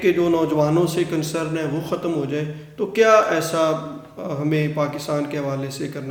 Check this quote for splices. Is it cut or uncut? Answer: uncut